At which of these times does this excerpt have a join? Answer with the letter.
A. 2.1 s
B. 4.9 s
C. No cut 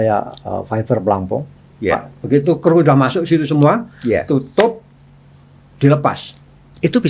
C